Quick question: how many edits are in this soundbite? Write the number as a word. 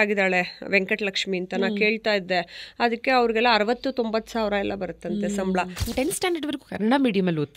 one